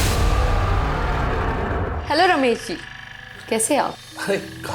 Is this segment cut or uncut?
cut